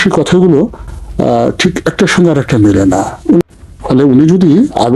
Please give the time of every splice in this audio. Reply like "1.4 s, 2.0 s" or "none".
3.4 s